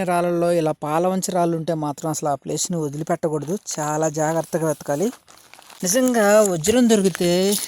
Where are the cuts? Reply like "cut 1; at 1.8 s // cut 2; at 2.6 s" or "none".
cut 1; at 5.9 s